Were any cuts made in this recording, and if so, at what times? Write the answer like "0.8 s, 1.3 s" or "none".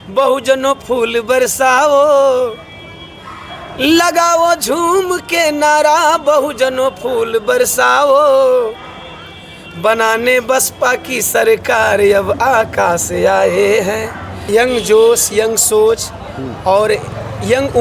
14.4 s